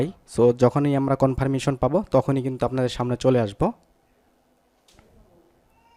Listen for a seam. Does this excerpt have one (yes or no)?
no